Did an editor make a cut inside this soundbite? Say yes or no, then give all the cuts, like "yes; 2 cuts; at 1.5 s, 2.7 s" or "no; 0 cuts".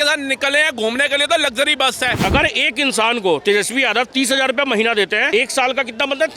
yes; 2 cuts; at 2.2 s, 5.2 s